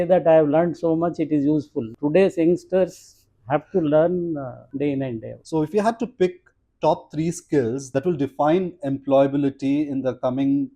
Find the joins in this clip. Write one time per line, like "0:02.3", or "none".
0:01.9
0:05.3
0:07.9

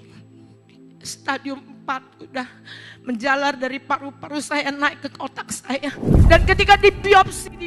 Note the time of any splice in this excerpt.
0:06.1

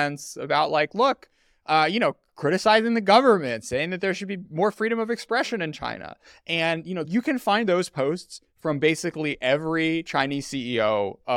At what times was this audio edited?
0:07.0

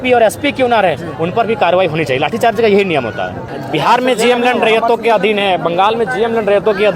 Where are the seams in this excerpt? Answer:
0:03.4

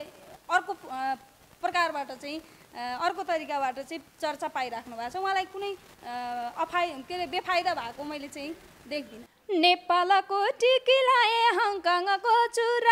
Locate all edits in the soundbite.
0:09.2

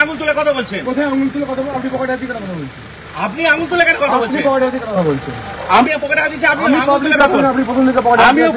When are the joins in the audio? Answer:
none

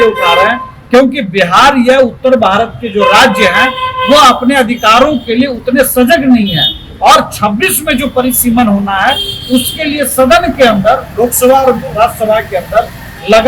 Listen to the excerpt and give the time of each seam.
none

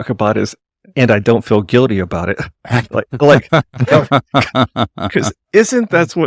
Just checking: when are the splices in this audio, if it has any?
none

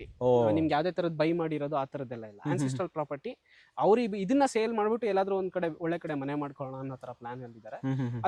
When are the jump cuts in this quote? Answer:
none

